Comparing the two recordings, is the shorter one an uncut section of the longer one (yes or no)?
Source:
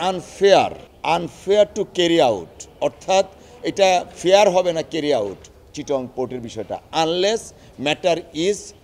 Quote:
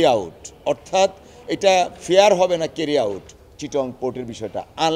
yes